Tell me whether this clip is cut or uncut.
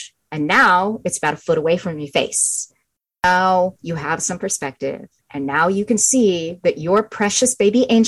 uncut